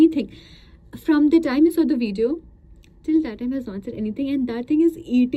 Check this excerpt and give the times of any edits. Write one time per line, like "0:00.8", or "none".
none